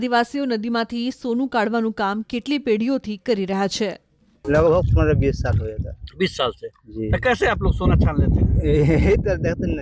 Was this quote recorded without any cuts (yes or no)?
yes